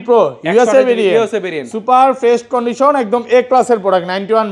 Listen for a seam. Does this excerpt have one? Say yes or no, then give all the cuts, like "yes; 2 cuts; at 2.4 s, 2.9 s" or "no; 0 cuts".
no; 0 cuts